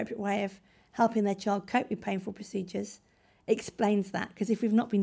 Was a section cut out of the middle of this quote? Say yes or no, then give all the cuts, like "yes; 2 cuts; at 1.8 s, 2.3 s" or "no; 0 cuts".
no; 0 cuts